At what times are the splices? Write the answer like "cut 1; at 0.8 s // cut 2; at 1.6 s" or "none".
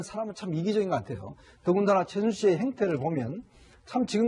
cut 1; at 2.5 s